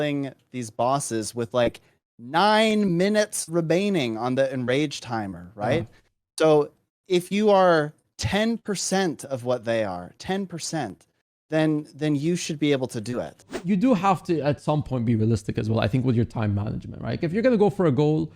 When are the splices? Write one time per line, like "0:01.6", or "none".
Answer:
0:13.5